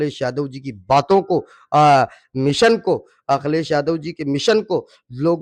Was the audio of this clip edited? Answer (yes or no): no